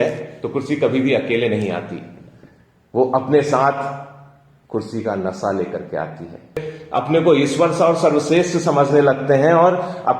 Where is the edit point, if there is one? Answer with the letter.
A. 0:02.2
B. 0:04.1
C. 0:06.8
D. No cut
C